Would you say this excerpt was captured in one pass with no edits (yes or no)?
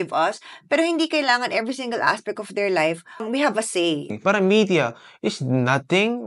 no